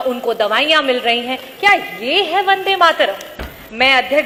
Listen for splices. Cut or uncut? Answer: uncut